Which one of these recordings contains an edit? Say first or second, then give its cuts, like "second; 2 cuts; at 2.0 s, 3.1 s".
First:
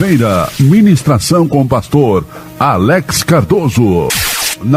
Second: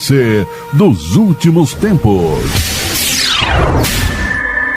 second; 1 cut; at 2.6 s